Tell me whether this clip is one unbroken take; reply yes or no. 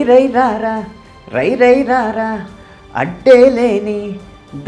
yes